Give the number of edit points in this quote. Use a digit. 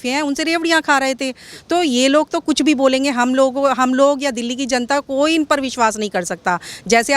0